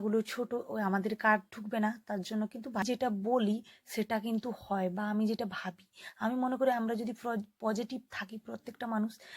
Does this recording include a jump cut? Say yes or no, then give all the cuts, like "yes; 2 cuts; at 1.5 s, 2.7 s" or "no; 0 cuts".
yes; 1 cut; at 2.8 s